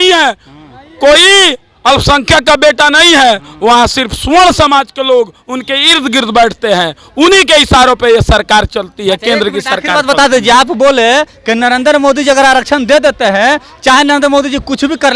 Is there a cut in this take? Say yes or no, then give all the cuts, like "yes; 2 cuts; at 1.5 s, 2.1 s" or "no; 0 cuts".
no; 0 cuts